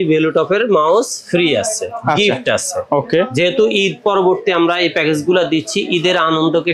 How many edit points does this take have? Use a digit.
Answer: 0